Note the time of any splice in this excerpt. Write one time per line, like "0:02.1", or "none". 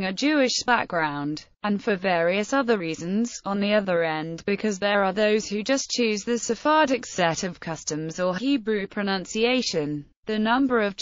none